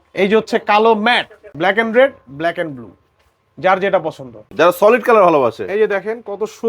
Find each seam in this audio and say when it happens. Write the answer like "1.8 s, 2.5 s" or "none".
1.4 s, 4.4 s